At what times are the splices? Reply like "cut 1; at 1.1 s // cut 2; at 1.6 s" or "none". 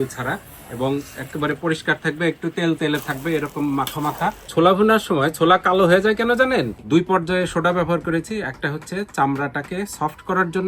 cut 1; at 4.4 s // cut 2; at 6.8 s